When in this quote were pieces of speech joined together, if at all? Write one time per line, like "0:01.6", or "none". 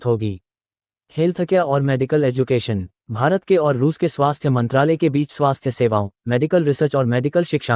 0:01.0